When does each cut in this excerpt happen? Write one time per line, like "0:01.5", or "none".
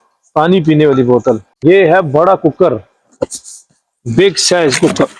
0:01.6